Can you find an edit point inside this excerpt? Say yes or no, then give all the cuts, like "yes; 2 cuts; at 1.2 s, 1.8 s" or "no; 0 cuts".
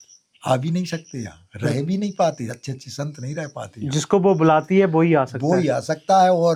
no; 0 cuts